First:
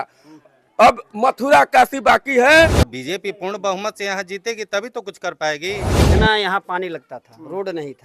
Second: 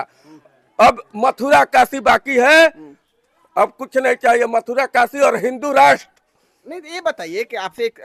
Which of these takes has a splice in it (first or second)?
first